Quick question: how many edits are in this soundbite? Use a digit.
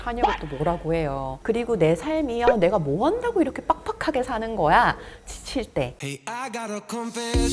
2